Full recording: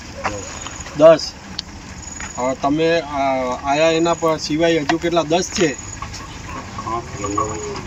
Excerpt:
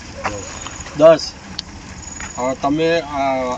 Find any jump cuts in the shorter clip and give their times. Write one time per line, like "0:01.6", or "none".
none